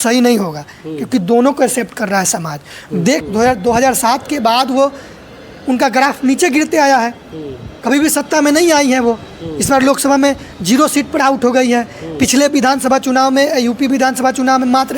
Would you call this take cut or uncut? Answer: cut